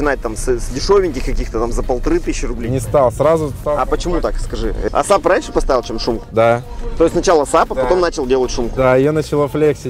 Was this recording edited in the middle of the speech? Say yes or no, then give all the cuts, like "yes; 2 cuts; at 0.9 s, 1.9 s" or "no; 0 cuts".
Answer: yes; 1 cut; at 4.8 s